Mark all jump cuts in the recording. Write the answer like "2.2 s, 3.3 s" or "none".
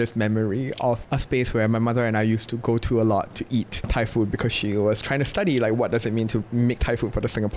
none

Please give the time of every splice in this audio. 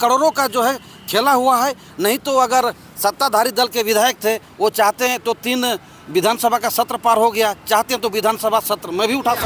none

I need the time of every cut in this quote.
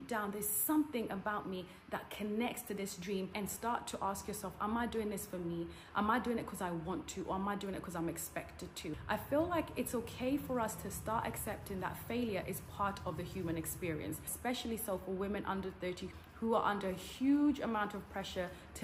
3.3 s, 9.0 s, 14.3 s

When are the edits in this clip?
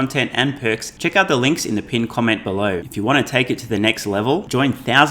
0.9 s, 2.9 s

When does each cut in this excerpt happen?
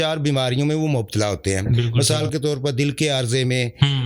none

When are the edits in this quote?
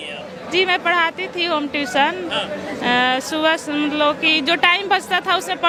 none

